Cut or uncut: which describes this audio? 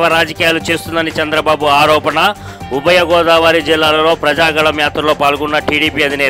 uncut